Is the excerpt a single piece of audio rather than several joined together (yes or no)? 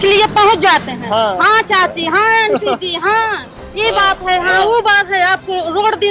yes